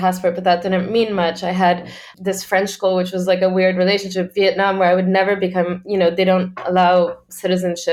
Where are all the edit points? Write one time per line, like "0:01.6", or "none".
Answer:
none